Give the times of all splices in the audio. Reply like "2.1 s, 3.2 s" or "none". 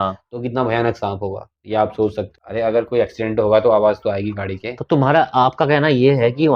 2.4 s